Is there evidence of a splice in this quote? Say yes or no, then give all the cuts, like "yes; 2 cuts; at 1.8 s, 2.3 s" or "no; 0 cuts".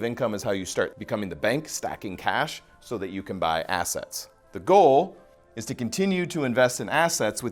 yes; 1 cut; at 1.0 s